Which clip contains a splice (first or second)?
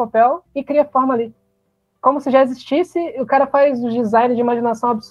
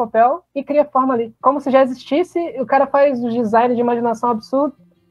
second